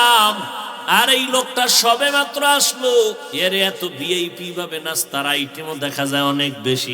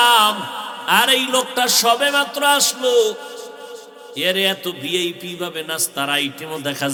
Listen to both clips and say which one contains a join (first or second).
first